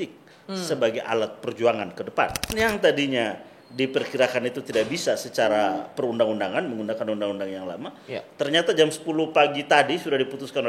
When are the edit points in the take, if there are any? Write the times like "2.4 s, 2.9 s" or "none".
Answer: 2.5 s